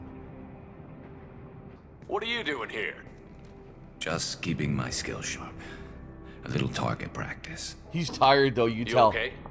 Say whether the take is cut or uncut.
cut